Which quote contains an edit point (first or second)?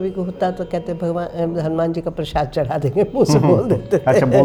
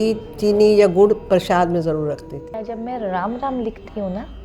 second